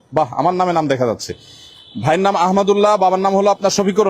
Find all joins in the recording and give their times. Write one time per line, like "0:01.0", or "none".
none